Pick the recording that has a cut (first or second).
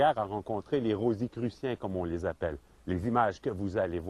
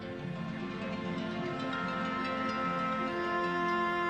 first